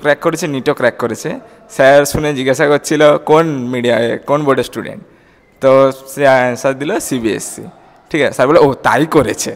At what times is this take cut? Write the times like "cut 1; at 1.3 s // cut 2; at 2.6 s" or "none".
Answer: none